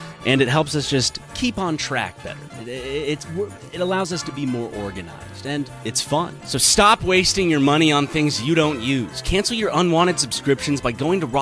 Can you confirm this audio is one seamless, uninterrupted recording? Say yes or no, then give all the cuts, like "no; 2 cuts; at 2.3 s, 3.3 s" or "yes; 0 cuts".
yes; 0 cuts